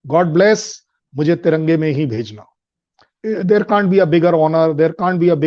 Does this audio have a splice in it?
no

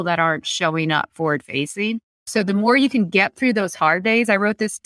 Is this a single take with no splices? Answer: no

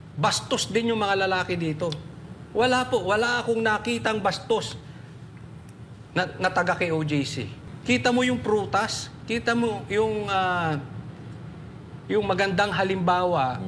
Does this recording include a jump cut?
yes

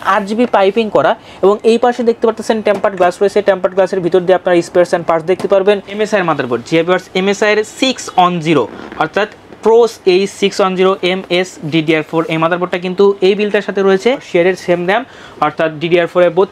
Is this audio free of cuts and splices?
no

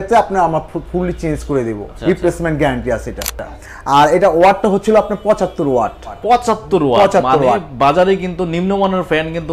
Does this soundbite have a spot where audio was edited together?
yes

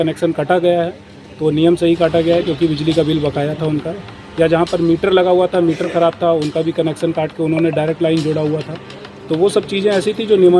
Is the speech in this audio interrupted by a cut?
no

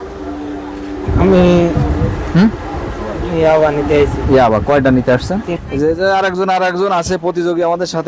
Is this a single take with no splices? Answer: no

